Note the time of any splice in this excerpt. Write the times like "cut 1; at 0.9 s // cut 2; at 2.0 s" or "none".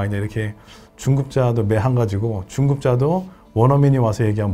none